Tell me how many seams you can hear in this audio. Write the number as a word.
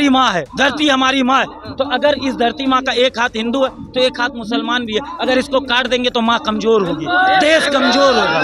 zero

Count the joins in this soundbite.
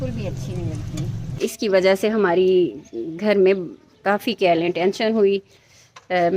one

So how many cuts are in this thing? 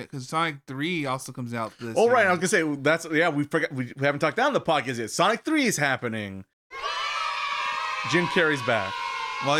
one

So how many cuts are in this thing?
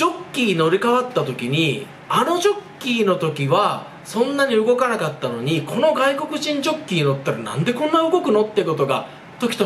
zero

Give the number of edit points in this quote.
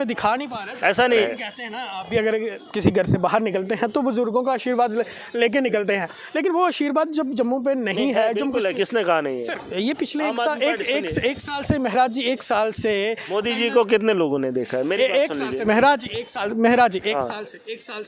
one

